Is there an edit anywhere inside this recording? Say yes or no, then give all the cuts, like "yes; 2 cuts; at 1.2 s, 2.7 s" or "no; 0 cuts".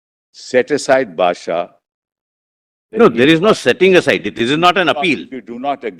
no; 0 cuts